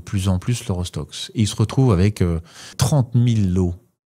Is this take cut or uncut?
cut